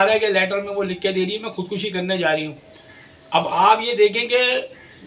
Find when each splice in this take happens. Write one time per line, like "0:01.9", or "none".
none